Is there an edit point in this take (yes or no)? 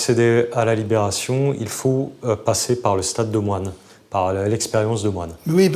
no